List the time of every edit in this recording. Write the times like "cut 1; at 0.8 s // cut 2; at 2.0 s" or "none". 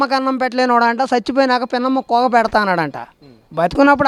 none